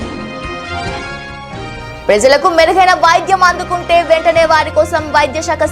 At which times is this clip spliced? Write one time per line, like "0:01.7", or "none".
0:01.6